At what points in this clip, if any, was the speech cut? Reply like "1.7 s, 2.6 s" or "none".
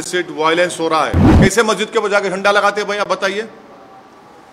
1.2 s